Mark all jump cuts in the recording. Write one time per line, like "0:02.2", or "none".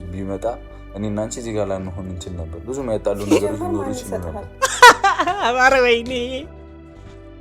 0:06.5